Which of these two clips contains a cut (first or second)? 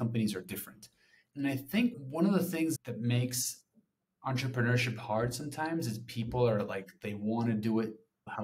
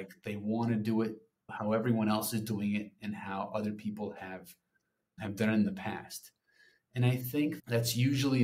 first